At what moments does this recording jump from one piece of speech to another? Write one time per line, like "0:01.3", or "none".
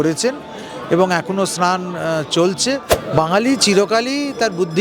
0:03.0